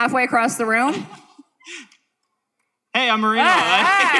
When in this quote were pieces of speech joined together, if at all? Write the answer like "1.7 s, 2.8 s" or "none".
none